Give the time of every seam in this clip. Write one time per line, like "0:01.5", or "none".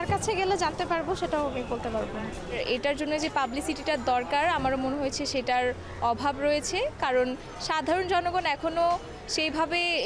none